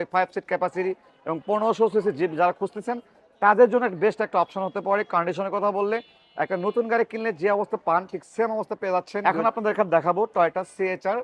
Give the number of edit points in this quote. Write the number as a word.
one